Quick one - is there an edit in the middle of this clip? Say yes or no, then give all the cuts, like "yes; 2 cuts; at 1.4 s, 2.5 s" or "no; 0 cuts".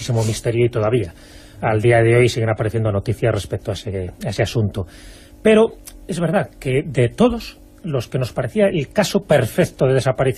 no; 0 cuts